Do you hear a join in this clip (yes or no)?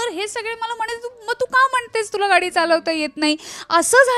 no